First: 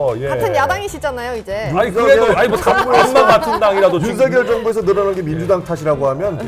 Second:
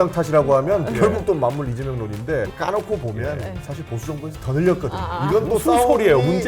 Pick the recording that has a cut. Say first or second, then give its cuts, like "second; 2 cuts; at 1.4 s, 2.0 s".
second; 1 cut; at 2.5 s